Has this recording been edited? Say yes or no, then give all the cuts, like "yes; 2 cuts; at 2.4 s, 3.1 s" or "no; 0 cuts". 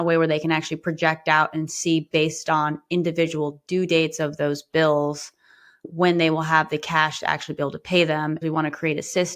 yes; 1 cut; at 8.4 s